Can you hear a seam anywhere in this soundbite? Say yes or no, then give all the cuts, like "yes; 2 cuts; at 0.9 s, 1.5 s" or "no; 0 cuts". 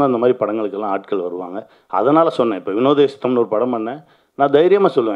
no; 0 cuts